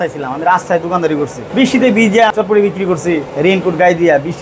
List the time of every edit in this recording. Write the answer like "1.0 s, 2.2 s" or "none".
1.4 s, 2.3 s, 3.3 s